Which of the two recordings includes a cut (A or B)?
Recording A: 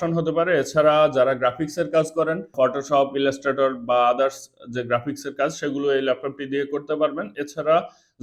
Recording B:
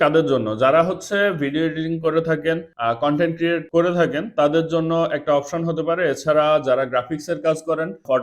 B